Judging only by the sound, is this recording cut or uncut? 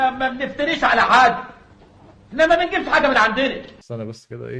uncut